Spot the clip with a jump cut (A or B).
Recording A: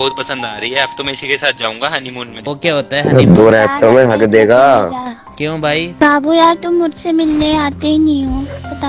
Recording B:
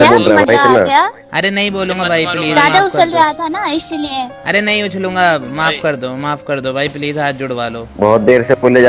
A